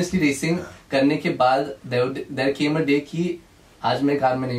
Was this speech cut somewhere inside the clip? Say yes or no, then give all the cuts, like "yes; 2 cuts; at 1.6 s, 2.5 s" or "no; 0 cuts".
no; 0 cuts